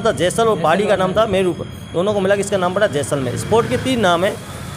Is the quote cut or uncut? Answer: uncut